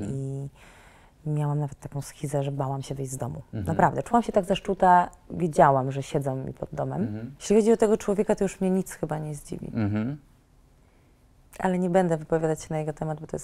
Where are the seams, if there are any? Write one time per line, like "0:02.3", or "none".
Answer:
0:07.3